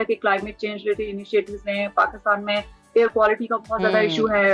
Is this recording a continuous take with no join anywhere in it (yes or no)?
yes